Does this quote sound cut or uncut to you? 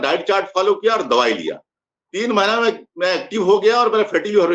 uncut